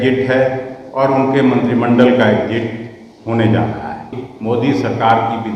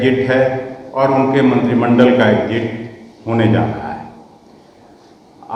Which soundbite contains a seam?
first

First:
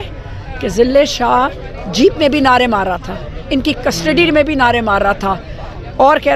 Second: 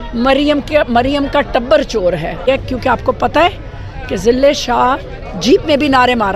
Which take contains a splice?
second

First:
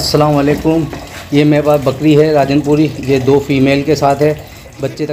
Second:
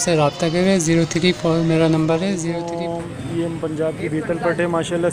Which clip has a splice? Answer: second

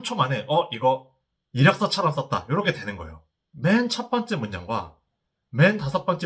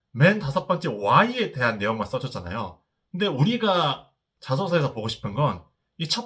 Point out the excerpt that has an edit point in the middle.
first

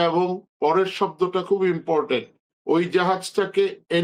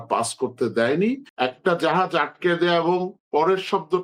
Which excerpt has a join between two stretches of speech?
second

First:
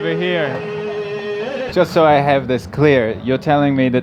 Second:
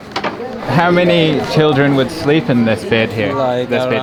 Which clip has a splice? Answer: first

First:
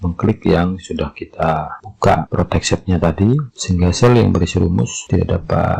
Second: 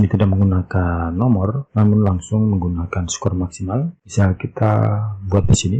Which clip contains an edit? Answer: second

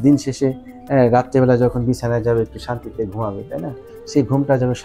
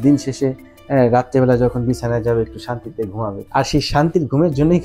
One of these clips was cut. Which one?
second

